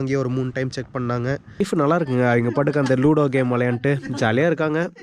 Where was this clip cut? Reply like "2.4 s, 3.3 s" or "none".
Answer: 1.6 s